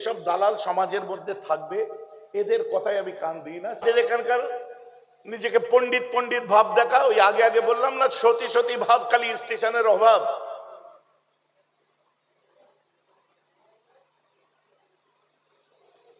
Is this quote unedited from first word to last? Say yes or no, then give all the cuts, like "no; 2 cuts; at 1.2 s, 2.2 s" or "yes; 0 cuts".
no; 1 cut; at 3.8 s